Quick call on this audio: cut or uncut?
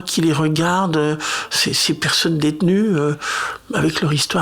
uncut